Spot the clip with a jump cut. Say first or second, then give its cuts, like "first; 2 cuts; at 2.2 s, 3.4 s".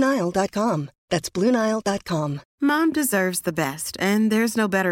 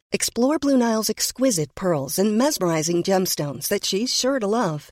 first; 1 cut; at 2.4 s